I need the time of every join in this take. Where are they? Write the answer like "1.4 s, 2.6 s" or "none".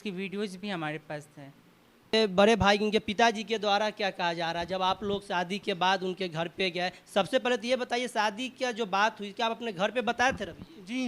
2.1 s